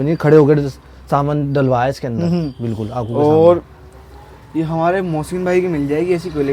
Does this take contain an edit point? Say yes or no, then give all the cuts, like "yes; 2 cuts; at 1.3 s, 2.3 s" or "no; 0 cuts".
no; 0 cuts